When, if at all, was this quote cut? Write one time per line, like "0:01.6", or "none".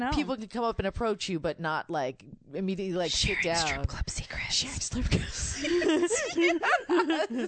none